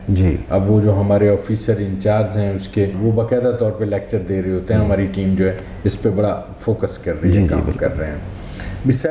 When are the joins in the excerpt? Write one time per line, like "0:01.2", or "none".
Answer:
0:03.0